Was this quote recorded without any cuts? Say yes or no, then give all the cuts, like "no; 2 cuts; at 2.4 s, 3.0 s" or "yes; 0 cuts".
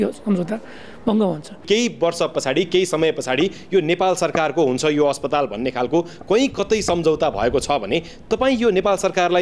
no; 1 cut; at 1.6 s